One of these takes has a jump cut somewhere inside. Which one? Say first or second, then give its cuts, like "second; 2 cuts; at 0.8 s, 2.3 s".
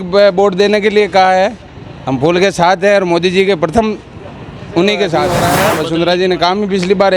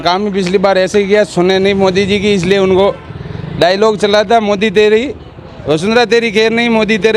first; 1 cut; at 5.3 s